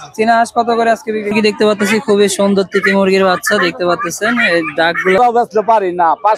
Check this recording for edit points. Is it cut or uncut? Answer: cut